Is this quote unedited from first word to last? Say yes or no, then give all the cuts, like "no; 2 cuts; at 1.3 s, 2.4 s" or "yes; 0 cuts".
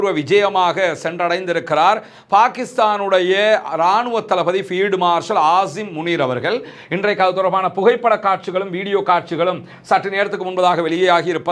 yes; 0 cuts